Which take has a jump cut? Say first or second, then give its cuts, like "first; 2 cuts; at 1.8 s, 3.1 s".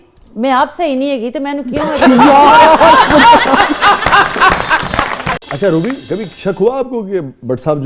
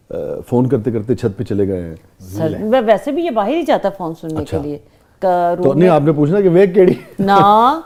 first; 1 cut; at 5.4 s